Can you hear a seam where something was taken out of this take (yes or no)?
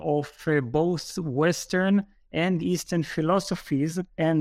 no